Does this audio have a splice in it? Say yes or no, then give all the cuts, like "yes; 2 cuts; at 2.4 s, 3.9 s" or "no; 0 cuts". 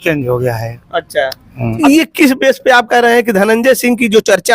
yes; 1 cut; at 1.8 s